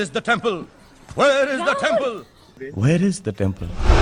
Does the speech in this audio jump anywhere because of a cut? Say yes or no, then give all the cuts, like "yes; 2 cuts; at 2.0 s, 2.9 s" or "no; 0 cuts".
no; 0 cuts